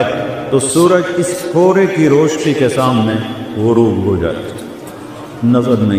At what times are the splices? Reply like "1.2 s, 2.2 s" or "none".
none